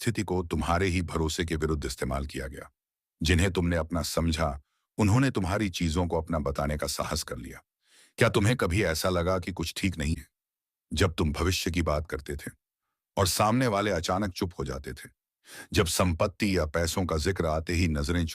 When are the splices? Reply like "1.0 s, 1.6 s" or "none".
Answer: 10.1 s